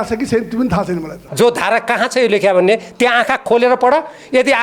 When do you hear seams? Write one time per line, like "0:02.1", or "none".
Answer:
0:01.2